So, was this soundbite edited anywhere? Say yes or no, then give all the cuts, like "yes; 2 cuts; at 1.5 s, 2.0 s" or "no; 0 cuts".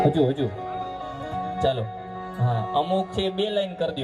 no; 0 cuts